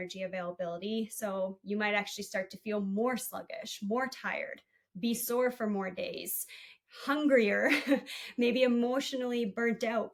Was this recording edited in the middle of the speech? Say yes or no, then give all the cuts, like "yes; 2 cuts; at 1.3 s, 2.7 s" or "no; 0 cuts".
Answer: no; 0 cuts